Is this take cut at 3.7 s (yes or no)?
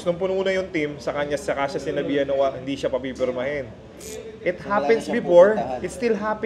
no